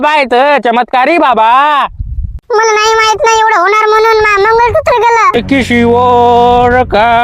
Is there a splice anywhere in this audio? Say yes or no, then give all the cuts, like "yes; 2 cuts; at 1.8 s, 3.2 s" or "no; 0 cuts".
yes; 1 cut; at 5.3 s